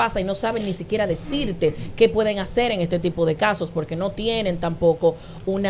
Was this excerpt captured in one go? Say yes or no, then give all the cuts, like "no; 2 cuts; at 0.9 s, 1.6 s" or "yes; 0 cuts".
yes; 0 cuts